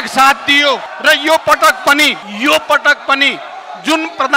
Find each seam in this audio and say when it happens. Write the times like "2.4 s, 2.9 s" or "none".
0.9 s, 2.2 s